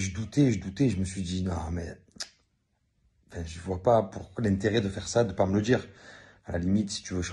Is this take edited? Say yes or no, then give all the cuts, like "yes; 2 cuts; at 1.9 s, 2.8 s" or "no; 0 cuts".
yes; 1 cut; at 4.6 s